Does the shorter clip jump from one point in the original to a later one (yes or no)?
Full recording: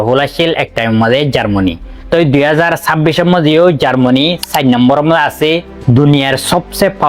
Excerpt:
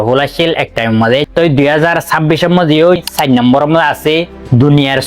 yes